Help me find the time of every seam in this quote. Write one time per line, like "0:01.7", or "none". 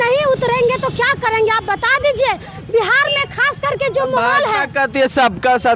none